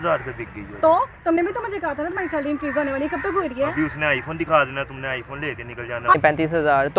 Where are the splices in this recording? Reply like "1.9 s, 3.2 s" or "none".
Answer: 1.4 s, 6.1 s